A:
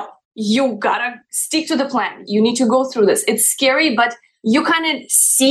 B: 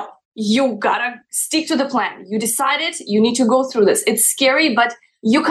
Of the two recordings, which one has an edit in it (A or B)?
A